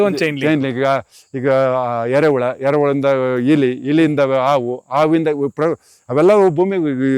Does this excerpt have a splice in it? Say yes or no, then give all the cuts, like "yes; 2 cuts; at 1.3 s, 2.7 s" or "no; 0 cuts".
no; 0 cuts